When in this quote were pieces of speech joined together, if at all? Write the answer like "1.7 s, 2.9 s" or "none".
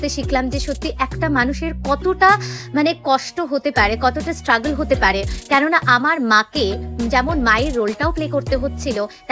none